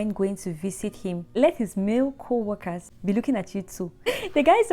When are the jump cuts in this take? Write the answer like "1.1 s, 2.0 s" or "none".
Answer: 1.3 s, 2.9 s, 4.1 s

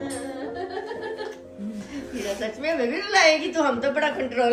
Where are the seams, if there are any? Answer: none

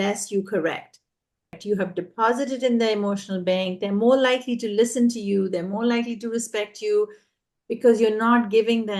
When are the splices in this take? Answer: 1.6 s

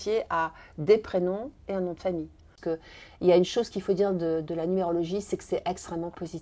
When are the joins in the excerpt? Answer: 2.5 s

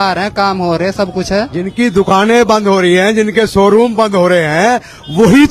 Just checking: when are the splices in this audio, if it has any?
1.7 s

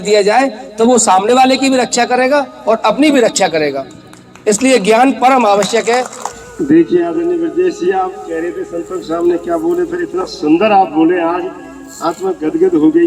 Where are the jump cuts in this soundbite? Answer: 6.2 s

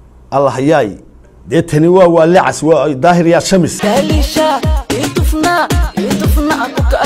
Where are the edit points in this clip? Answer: 3.7 s

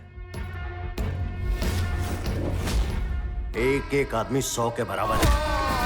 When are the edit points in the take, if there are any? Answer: none

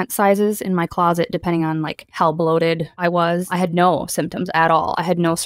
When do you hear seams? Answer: 2.0 s, 3.3 s

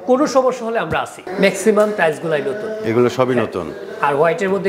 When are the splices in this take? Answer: 1.2 s

